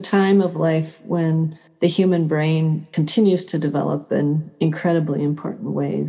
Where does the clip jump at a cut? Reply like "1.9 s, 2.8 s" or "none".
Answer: 1.6 s, 2.9 s